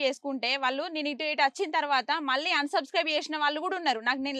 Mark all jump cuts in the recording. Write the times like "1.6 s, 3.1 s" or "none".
none